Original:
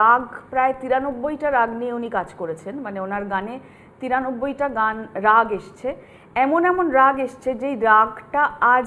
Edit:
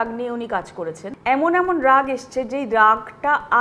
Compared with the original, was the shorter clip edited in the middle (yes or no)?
yes